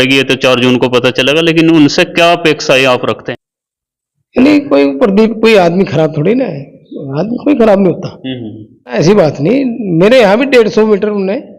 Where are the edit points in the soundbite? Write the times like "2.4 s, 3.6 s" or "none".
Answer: 3.2 s, 8.9 s